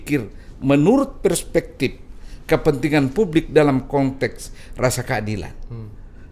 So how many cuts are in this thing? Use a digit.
0